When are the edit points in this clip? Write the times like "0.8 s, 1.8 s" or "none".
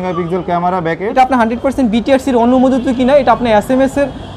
1.1 s